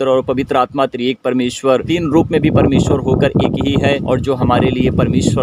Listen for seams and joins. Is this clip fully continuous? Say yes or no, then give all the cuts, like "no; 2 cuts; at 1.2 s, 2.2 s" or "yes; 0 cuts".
no; 2 cuts; at 1.9 s, 4.0 s